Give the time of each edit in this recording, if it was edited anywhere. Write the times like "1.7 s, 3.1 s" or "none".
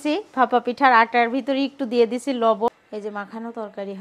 2.7 s